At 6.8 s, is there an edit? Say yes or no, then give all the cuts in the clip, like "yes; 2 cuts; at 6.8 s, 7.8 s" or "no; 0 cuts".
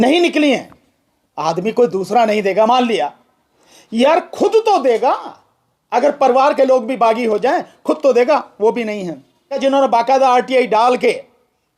no; 1 cut; at 9.5 s